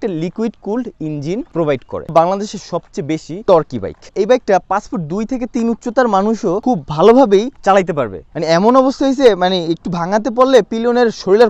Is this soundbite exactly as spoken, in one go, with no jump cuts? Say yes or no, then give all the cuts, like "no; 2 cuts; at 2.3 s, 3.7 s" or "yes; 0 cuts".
no; 5 cuts; at 2.1 s, 3.3 s, 4.1 s, 6.6 s, 8.3 s